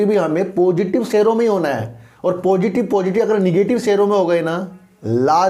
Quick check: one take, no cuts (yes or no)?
yes